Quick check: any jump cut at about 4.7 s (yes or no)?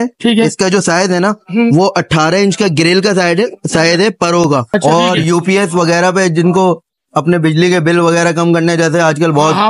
yes